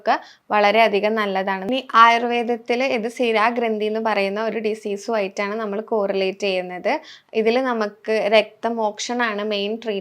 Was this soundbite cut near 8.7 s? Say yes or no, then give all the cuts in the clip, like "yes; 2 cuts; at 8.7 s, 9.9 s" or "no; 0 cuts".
no; 1 cut; at 1.6 s